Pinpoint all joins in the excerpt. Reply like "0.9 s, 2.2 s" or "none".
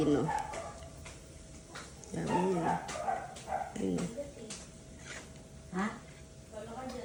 none